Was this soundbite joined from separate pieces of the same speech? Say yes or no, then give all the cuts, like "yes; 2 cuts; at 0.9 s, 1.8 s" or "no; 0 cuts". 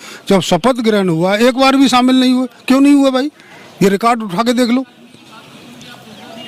no; 0 cuts